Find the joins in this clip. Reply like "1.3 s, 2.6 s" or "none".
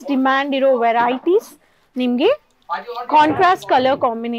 none

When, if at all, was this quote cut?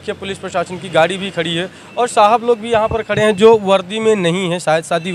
none

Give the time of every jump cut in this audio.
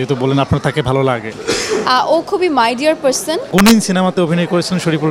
3.4 s

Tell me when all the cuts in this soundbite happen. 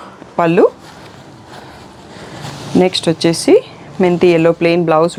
none

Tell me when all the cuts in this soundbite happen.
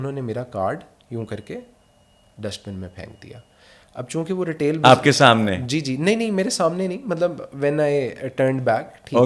none

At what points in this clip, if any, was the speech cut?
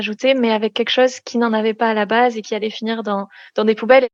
none

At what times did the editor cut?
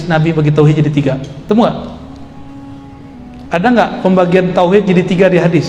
1.3 s

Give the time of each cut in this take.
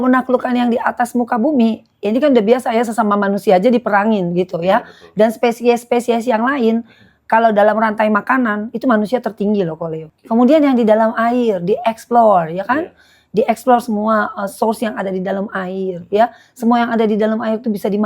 10.1 s

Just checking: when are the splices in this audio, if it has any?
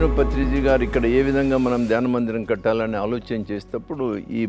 none

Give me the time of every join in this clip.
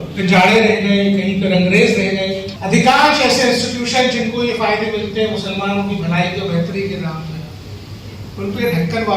2.5 s

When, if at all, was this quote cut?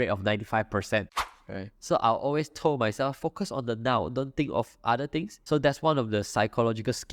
1.2 s, 5.4 s

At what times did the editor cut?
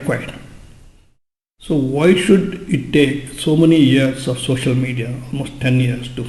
1.3 s

